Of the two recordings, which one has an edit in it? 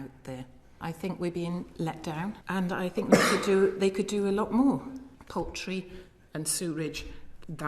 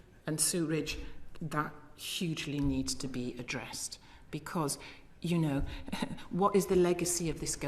first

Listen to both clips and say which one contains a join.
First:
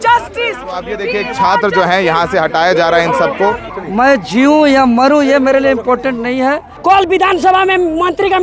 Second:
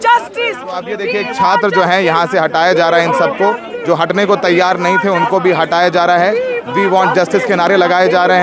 first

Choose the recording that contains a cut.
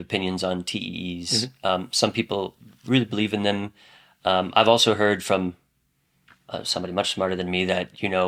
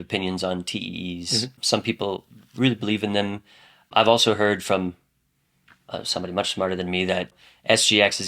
second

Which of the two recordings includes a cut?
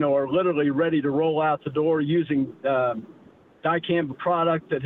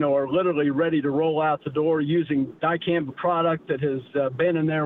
second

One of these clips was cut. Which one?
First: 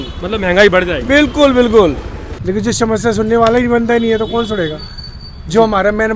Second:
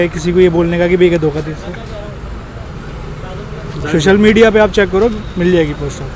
first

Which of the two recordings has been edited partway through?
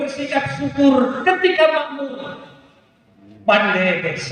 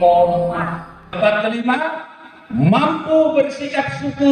second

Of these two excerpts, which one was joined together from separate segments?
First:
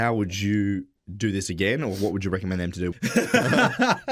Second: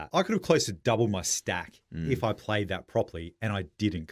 first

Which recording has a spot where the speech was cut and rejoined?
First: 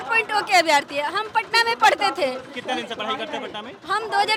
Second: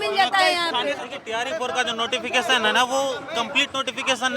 second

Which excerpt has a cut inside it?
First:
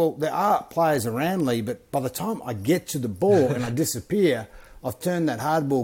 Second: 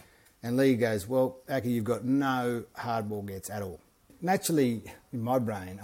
second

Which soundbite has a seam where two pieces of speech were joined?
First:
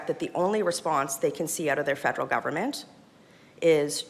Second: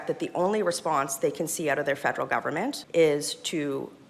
second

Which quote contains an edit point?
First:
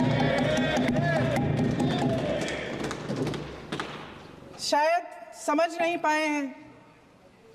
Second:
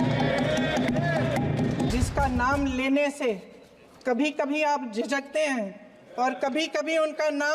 second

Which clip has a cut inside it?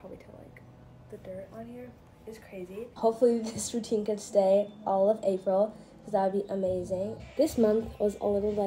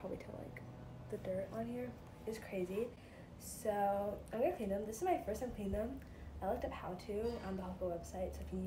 first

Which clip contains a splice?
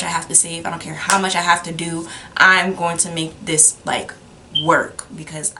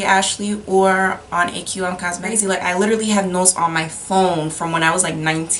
second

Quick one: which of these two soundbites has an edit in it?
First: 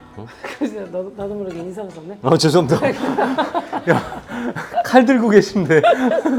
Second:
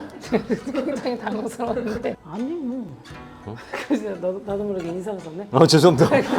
second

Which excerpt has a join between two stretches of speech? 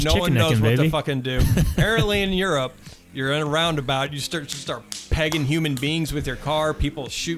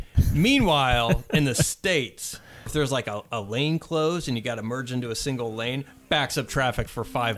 second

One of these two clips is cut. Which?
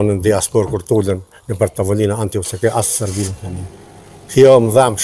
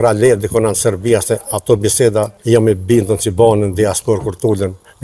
second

